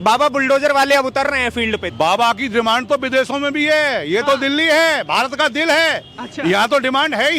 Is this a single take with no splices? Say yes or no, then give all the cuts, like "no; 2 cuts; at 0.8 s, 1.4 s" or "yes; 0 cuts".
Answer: no; 1 cut; at 1.9 s